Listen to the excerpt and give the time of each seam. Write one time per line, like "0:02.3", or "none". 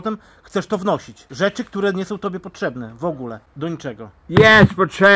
0:01.2
0:03.4